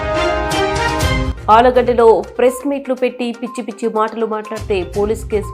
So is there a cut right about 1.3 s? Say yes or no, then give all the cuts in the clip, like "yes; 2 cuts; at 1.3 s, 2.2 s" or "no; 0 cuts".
yes; 1 cut; at 1.3 s